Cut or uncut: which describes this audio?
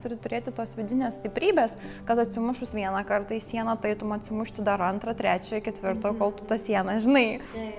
uncut